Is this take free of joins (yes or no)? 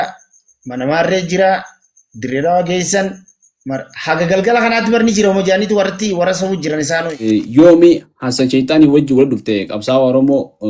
no